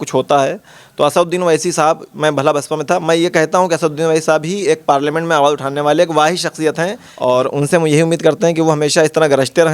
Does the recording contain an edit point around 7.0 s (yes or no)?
yes